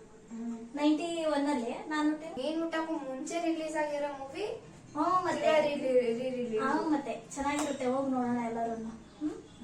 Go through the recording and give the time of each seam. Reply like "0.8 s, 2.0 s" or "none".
2.4 s